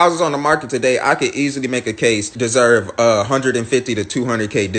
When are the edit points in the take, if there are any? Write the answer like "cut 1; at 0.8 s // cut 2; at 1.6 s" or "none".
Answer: cut 1; at 2.3 s